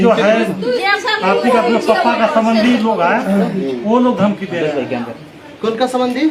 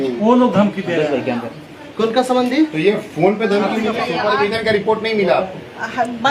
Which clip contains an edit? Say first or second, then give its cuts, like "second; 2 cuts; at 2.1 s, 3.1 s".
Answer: second; 1 cut; at 4.0 s